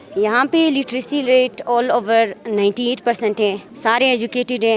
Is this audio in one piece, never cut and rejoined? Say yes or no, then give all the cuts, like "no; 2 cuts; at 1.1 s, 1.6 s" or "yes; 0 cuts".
no; 1 cut; at 3.7 s